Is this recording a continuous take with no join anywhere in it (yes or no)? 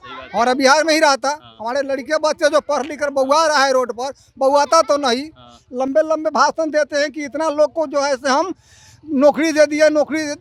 yes